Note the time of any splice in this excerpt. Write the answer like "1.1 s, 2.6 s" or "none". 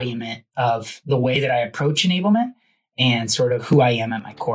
3.6 s